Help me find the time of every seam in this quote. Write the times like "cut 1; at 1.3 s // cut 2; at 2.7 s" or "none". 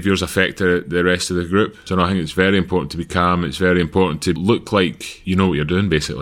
cut 1; at 1.8 s // cut 2; at 4.4 s // cut 3; at 5.1 s